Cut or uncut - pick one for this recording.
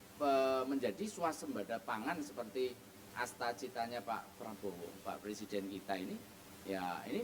uncut